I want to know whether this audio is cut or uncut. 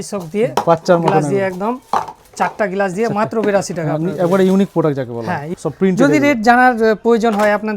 cut